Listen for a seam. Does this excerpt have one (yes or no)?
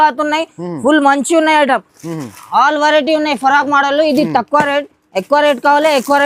no